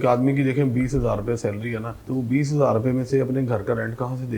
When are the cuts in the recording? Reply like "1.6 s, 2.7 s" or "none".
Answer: 1.9 s